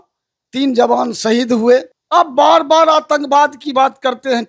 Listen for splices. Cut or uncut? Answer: cut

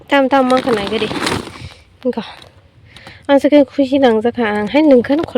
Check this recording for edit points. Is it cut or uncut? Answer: uncut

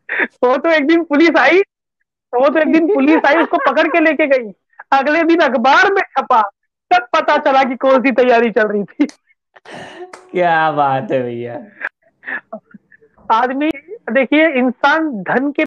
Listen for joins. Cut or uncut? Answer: cut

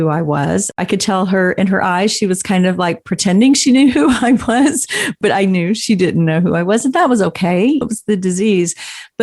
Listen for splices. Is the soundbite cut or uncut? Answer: cut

